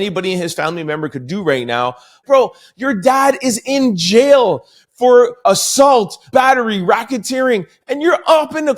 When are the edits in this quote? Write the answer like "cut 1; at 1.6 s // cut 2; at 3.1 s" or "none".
cut 1; at 2.2 s // cut 2; at 5.3 s // cut 3; at 6.3 s